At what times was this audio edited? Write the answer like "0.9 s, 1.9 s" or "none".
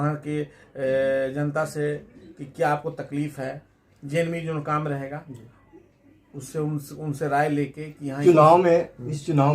8.2 s